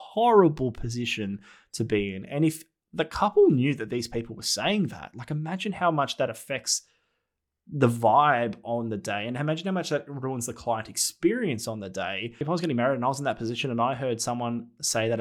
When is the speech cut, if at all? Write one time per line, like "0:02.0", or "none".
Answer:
0:12.4